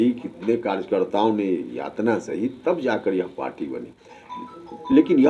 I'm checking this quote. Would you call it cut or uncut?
uncut